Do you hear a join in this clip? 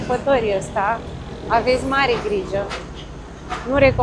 no; 0 cuts

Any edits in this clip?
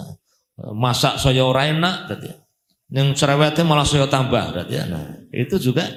no; 0 cuts

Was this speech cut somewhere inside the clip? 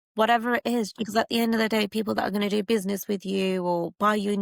yes; 1 cut; at 0.9 s

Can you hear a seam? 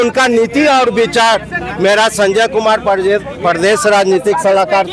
no; 0 cuts

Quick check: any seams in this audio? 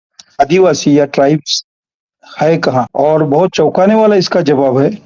yes; 1 cut; at 2.9 s

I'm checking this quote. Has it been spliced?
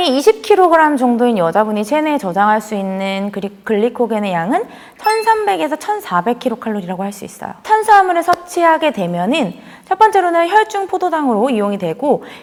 no; 0 cuts

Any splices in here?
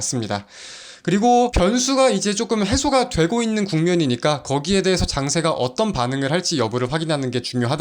yes; 1 cut; at 1.5 s

